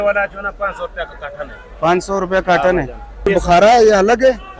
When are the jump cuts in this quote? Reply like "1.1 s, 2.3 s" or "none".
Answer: none